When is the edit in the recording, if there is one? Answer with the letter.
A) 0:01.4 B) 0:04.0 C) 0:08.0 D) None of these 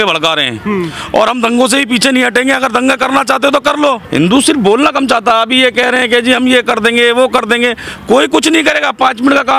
B